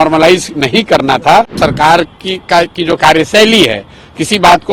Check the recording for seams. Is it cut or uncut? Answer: cut